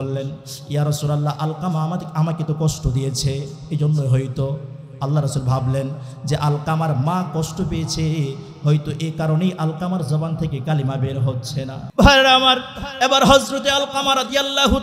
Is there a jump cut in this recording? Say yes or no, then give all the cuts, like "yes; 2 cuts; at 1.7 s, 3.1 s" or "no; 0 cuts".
yes; 1 cut; at 11.8 s